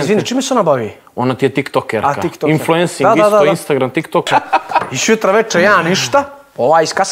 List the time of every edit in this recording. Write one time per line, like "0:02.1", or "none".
0:04.3